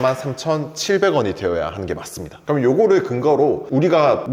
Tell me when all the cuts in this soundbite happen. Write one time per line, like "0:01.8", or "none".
0:02.3